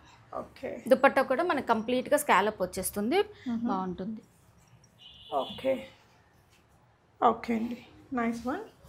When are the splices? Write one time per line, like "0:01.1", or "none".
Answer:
none